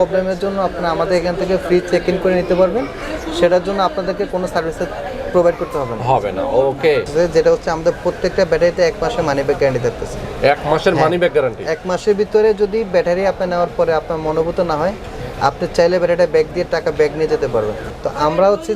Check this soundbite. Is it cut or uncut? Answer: cut